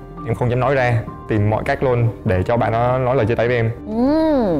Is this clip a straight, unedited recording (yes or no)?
no